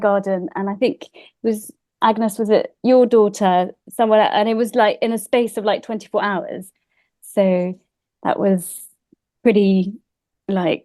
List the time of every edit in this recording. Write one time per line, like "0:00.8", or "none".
none